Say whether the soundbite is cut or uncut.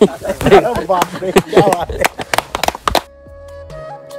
cut